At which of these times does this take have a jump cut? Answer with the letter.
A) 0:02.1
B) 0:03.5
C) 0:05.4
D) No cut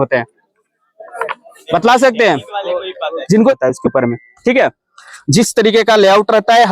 B